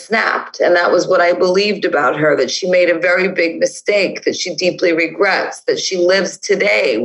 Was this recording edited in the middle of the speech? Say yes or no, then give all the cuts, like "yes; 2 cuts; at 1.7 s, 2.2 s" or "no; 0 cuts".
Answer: no; 0 cuts